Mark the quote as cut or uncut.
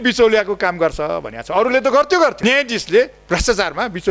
cut